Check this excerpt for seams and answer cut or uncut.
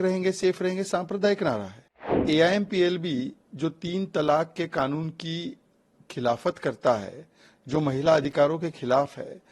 cut